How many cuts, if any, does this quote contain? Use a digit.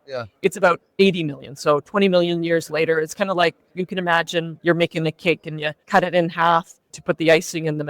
4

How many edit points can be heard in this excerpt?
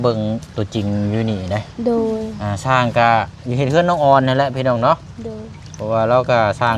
0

